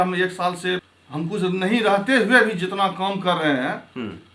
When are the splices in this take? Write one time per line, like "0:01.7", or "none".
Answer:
0:00.9